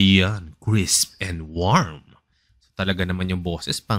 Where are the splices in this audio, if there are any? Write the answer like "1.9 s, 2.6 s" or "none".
none